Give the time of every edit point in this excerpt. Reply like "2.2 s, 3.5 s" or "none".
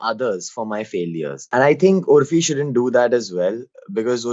1.4 s